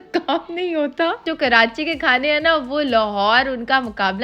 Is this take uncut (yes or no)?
no